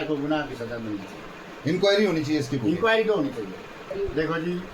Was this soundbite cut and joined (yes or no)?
yes